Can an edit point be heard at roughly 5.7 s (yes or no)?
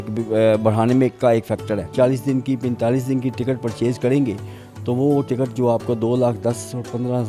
no